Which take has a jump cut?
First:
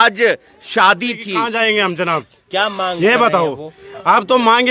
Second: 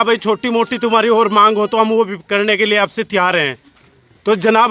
first; 1 cut; at 1.3 s

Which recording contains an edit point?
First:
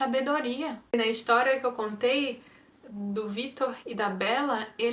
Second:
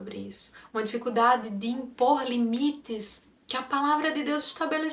first; 1 cut; at 0.9 s

